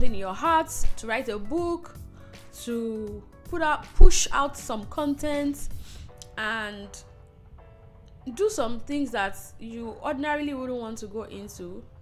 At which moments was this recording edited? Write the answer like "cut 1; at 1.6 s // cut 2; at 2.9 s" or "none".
none

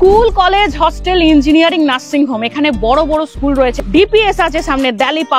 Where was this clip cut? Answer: cut 1; at 3.8 s

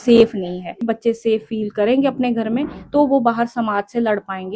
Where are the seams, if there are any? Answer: cut 1; at 0.9 s

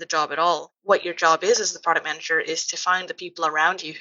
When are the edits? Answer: none

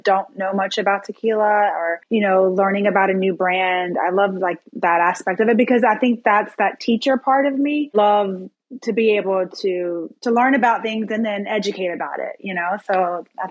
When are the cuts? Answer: cut 1; at 2.0 s // cut 2; at 7.9 s

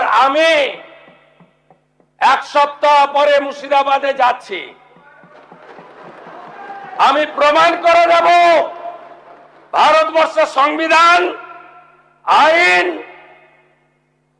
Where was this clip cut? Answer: none

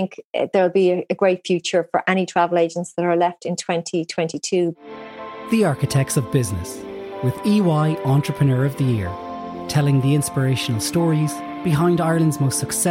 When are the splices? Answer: cut 1; at 4.8 s

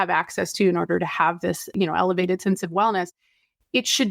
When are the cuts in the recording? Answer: cut 1; at 1.7 s

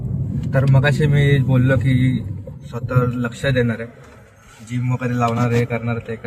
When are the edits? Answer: none

